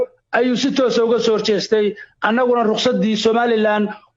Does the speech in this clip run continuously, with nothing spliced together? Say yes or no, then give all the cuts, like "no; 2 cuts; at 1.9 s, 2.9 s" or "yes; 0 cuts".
yes; 0 cuts